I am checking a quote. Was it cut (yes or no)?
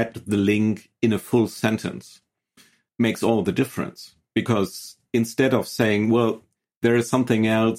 yes